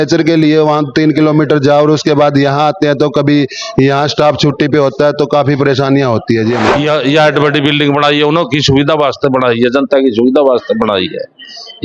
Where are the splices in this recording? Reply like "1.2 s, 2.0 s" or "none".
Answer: 6.7 s